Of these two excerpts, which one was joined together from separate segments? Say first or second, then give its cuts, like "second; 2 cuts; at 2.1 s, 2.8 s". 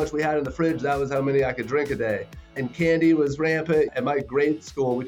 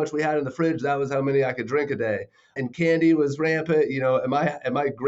first; 1 cut; at 3.9 s